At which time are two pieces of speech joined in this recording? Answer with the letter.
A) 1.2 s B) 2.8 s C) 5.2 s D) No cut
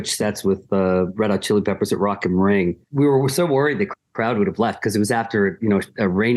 B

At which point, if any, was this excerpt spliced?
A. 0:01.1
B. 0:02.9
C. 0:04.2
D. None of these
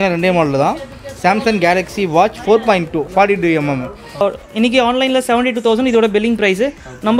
C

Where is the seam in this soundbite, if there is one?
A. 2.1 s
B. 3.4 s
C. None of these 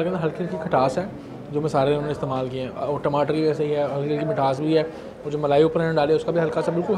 C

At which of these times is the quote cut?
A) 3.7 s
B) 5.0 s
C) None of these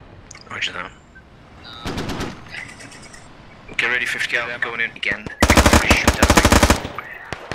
B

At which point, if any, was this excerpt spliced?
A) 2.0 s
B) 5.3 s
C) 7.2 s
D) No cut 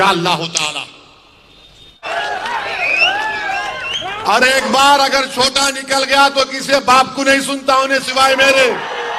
A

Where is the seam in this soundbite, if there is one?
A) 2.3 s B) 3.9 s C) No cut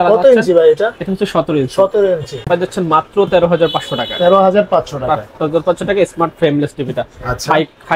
A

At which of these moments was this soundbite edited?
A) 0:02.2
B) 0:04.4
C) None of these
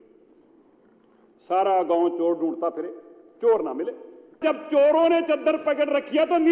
B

